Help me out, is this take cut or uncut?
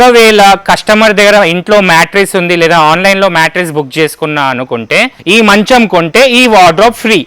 cut